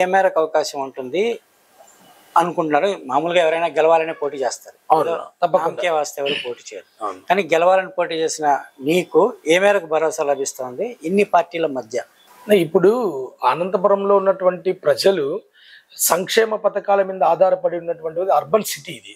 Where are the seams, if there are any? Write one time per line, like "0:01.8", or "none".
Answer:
none